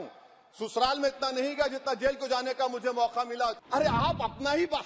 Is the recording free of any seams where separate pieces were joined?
no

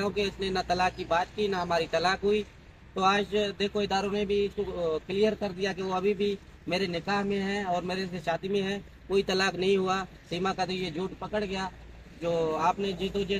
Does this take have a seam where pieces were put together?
no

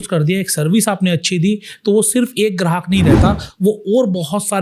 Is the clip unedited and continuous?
yes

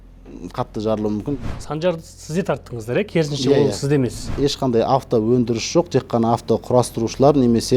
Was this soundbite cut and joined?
yes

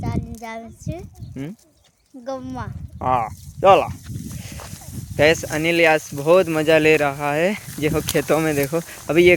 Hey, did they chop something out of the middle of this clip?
no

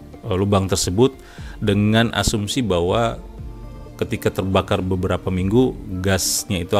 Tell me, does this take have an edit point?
no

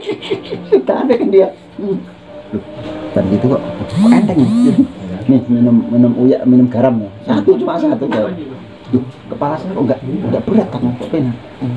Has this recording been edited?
yes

